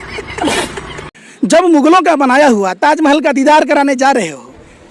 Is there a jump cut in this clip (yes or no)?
yes